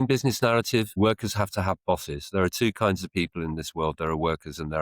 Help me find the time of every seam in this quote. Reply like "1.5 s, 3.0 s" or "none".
0.9 s